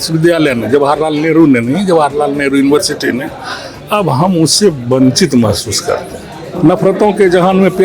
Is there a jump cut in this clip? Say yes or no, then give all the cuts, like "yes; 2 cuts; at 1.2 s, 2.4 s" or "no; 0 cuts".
yes; 1 cut; at 6.5 s